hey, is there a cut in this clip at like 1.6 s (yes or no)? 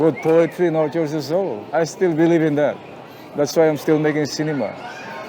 yes